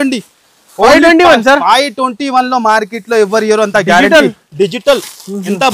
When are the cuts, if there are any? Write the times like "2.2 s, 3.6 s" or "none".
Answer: none